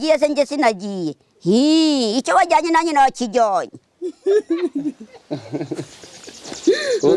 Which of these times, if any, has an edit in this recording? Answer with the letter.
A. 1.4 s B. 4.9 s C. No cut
C